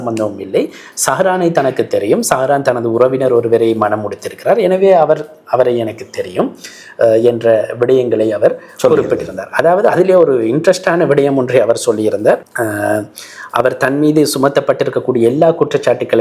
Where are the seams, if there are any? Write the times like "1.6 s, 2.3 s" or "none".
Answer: none